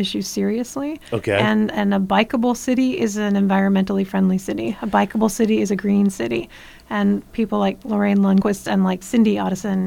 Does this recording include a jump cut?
yes; 1 cut; at 8.8 s

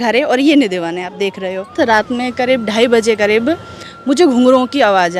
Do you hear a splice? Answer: yes; 1 cut; at 1.7 s

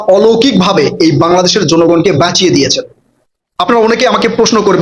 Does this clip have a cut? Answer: no; 0 cuts

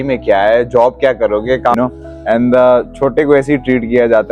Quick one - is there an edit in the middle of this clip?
yes; 1 cut; at 1.7 s

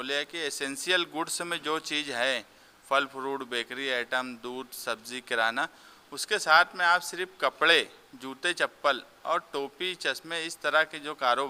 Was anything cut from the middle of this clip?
no; 0 cuts

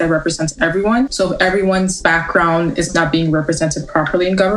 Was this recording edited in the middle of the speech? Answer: yes; 3 cuts; at 1.1 s, 2.0 s, 2.9 s

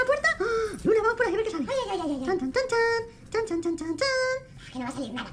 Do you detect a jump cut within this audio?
no; 0 cuts

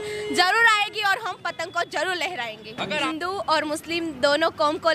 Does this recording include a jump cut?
yes; 1 cut; at 3.0 s

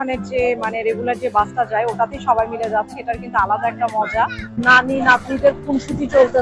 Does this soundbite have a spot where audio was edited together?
yes; 1 cut; at 4.4 s

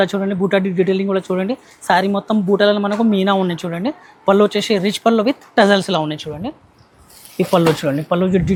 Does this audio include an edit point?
no; 0 cuts

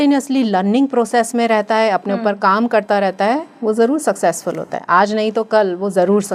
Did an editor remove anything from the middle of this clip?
no; 0 cuts

